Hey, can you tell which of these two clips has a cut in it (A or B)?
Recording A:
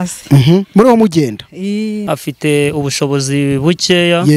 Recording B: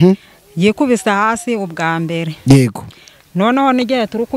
A